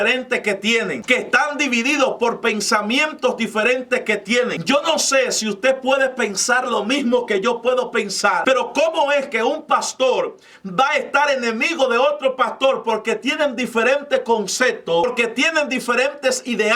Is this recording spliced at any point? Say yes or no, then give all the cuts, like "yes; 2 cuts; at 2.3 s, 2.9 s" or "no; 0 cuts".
yes; 4 cuts; at 1.0 s, 4.6 s, 8.4 s, 15.0 s